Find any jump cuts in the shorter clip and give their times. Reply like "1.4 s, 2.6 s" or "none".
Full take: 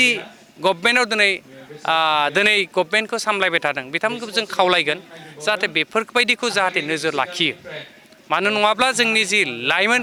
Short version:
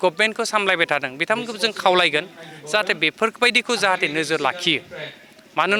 none